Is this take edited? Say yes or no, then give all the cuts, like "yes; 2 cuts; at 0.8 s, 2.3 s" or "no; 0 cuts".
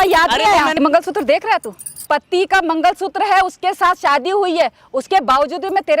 yes; 2 cuts; at 0.8 s, 2.0 s